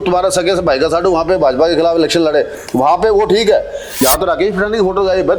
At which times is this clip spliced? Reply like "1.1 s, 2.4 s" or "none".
4.0 s